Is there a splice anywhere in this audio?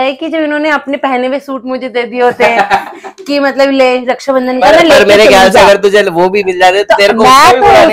no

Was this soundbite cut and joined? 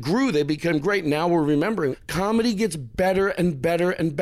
yes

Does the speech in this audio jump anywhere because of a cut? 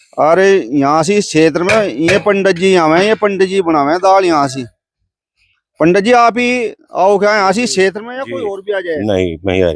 no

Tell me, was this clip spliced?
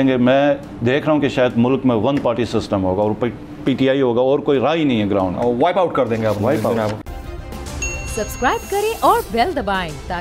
yes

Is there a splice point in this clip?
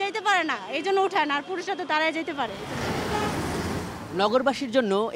no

